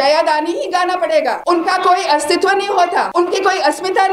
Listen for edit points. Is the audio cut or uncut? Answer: cut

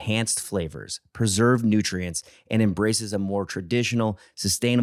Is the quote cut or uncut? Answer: uncut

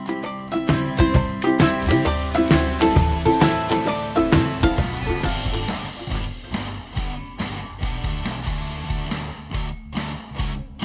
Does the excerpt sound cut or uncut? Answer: cut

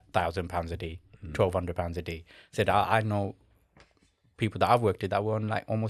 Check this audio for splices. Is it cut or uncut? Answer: uncut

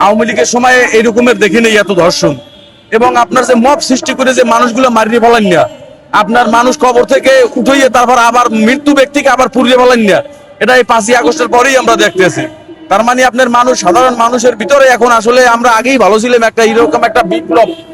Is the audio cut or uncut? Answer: uncut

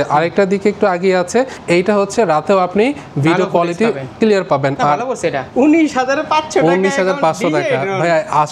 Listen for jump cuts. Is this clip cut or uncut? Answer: cut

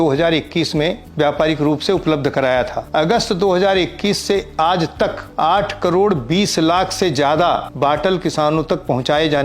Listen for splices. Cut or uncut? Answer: cut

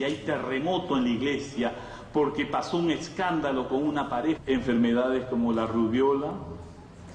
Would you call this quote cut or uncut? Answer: uncut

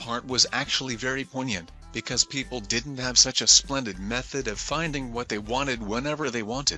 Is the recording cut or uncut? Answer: uncut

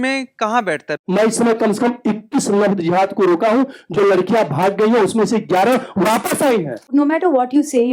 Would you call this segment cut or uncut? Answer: cut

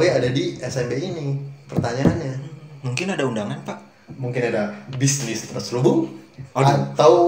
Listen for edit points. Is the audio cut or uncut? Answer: uncut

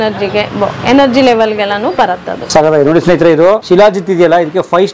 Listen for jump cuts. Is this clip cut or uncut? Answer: cut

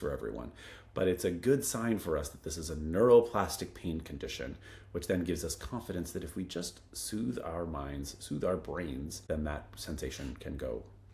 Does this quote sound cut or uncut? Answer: cut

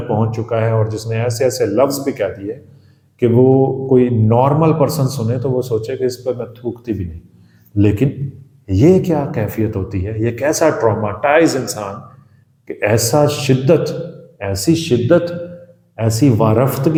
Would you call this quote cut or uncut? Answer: uncut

